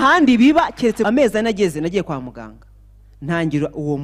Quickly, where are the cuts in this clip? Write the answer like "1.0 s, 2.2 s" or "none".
1.1 s